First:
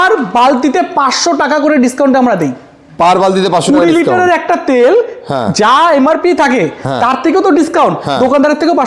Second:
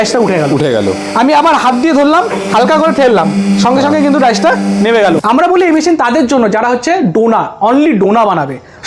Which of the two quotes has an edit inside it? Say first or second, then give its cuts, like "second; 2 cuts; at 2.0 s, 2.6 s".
second; 1 cut; at 5.2 s